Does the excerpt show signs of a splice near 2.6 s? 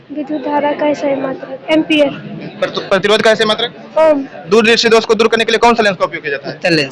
no; 1 cut; at 4.5 s

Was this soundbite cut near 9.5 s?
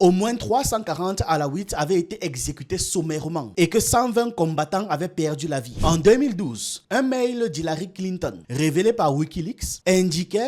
no; 1 cut; at 5.7 s

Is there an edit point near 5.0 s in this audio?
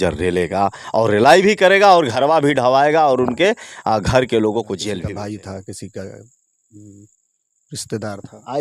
yes; 1 cut; at 5.0 s

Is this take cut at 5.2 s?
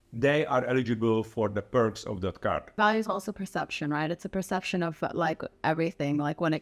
no; 1 cut; at 2.8 s

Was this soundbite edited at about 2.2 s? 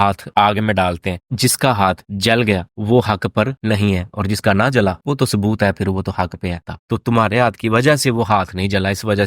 no; 1 cut; at 6.7 s

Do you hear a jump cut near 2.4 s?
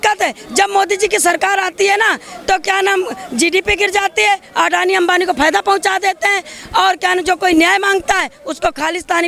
no; 0 cuts

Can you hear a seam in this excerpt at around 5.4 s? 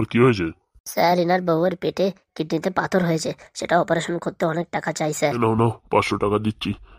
yes; 1 cut; at 5.4 s

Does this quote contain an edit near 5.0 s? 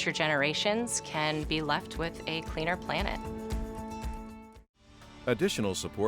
yes; 1 cut; at 5.0 s

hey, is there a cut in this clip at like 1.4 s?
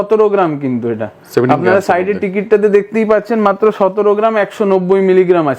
no; 0 cuts

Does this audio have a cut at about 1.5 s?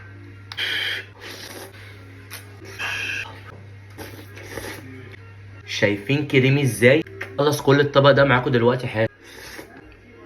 yes; 3 cuts; at 1.5 s, 2.8 s, 7.2 s

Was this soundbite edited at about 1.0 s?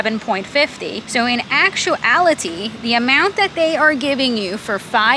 yes; 1 cut; at 1.0 s

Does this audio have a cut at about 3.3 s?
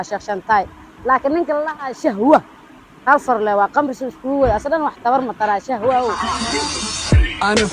no; 1 cut; at 6.2 s

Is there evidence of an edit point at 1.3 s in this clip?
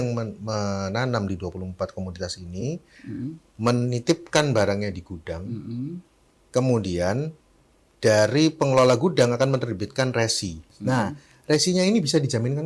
no; 1 cut; at 10.6 s

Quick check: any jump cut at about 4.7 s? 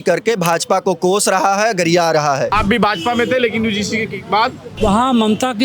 yes; 2 cuts; at 2.5 s, 4.7 s

